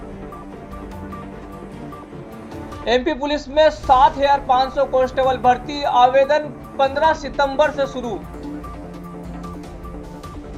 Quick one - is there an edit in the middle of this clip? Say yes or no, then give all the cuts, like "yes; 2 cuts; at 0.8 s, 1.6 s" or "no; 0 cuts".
no; 0 cuts